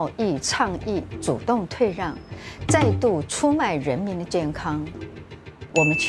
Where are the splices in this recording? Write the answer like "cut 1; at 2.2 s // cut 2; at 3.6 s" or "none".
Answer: none